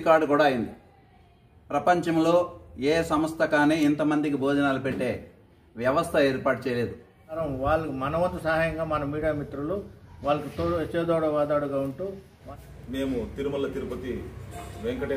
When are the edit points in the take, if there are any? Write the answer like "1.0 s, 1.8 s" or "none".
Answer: 7.4 s, 12.3 s